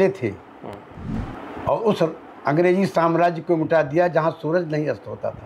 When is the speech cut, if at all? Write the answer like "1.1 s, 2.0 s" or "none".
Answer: 1.2 s